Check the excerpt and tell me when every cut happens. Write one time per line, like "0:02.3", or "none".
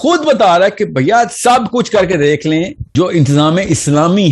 0:02.8